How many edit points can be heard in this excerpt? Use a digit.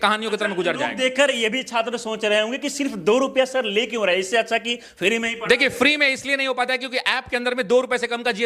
0